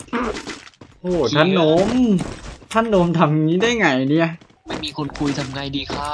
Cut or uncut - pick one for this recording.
cut